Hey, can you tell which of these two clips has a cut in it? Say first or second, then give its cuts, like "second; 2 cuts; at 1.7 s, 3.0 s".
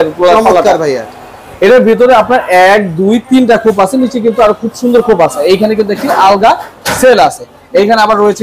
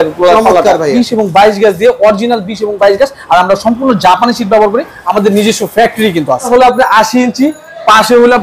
second; 2 cuts; at 1.0 s, 6.5 s